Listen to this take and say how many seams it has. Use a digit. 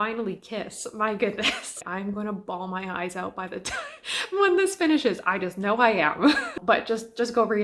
2